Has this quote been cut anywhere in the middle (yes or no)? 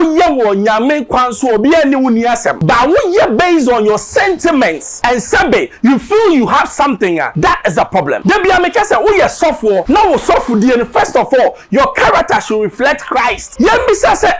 yes